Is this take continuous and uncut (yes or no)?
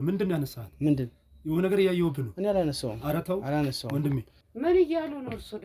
no